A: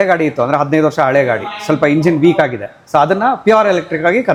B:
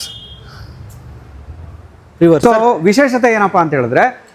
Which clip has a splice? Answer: B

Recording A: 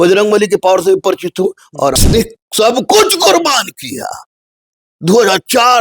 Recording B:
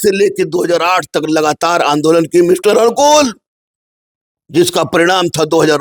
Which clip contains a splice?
A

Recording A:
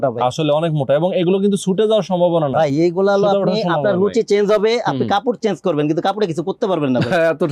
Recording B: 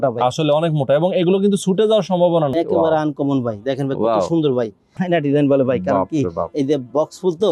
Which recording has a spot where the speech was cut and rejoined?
B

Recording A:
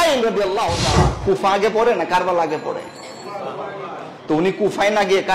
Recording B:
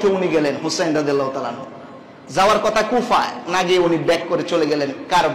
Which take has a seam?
A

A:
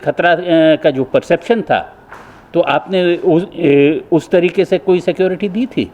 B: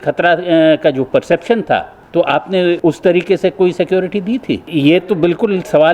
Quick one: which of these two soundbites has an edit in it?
B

